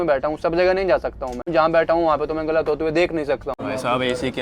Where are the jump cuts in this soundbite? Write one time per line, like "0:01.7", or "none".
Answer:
0:01.1
0:03.6